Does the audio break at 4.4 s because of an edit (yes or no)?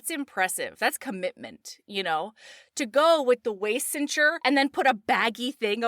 yes